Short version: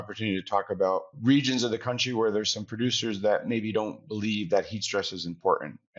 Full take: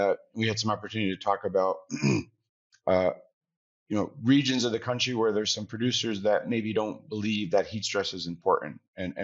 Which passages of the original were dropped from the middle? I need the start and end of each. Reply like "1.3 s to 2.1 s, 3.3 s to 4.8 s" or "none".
1.9 s to 4.1 s